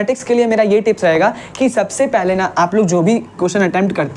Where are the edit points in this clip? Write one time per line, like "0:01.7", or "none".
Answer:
none

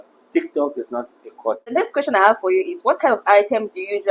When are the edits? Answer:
0:01.7

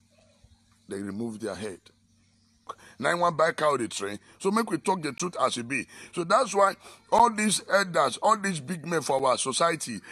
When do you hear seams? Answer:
0:02.8

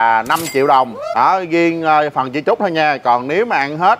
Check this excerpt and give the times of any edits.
0:01.0

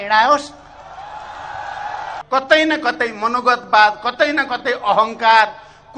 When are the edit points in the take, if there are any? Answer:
0:02.2

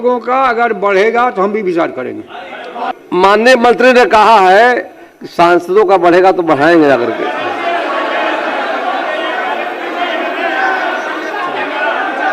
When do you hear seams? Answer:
0:02.9

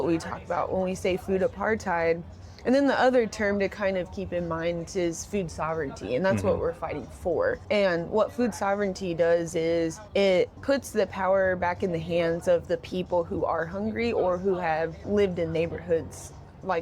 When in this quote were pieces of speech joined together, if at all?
0:07.6
0:10.0
0:10.6
0:15.0

